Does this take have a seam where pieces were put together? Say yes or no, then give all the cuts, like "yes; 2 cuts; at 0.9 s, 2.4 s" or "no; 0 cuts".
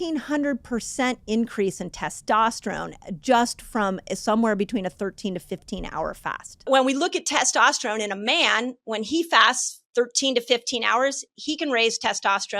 yes; 1 cut; at 6.7 s